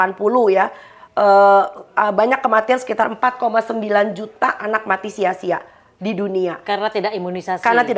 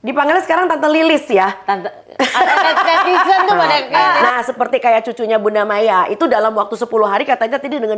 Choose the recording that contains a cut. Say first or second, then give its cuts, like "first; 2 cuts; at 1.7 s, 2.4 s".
second; 1 cut; at 4.3 s